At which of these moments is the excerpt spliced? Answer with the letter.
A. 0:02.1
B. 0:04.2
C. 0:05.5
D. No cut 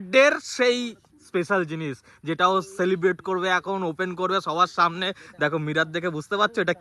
D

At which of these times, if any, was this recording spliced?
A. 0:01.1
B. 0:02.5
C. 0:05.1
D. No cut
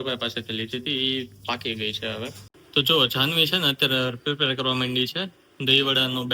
B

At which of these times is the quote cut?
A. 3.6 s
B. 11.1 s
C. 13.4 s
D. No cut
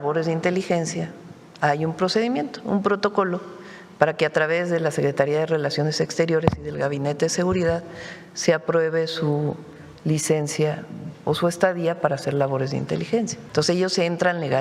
C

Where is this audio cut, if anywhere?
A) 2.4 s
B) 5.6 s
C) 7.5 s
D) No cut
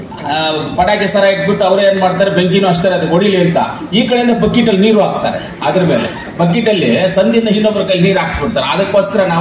D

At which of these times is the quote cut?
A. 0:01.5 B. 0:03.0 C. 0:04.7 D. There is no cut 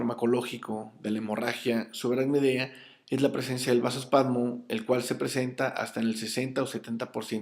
C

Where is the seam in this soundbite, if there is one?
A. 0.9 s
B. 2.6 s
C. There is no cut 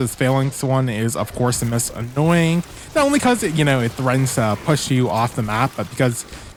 C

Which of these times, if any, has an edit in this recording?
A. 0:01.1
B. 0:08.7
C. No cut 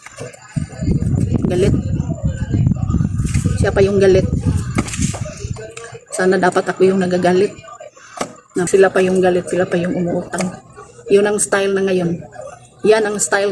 B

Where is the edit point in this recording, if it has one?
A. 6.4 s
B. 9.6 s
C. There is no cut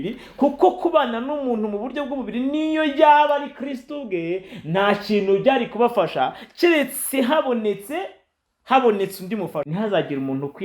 B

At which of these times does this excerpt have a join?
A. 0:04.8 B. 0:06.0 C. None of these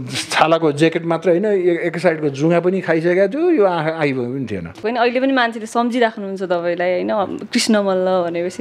A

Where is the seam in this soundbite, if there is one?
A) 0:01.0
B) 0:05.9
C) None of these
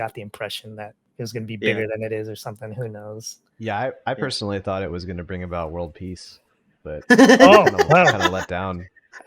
A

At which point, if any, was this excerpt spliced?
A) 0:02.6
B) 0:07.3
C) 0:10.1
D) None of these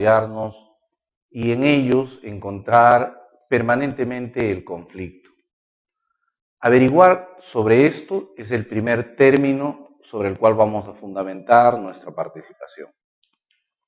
C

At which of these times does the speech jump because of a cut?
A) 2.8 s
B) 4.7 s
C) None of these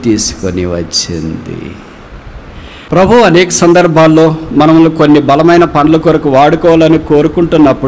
A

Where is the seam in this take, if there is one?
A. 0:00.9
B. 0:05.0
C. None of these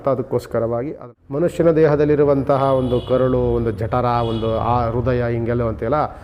A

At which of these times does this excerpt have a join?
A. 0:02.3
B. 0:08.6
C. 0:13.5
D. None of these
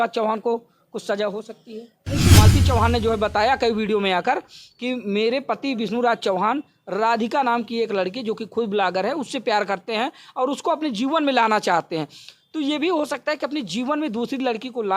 A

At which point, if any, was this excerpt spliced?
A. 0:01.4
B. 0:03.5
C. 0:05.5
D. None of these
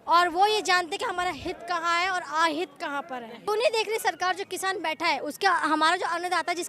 B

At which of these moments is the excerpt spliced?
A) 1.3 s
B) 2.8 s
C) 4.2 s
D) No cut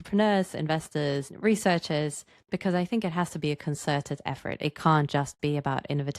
A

